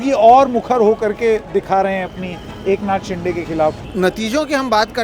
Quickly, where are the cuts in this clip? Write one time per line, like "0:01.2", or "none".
0:03.8